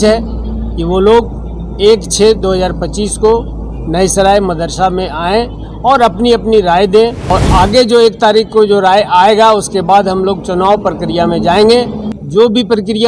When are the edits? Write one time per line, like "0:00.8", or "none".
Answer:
0:07.3
0:12.0